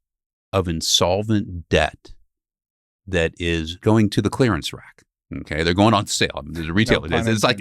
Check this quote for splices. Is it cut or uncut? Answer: cut